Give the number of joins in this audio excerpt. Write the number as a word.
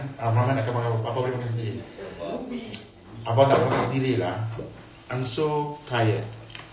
one